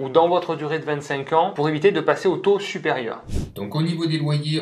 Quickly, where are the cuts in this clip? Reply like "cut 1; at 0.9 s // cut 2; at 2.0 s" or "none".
cut 1; at 3.2 s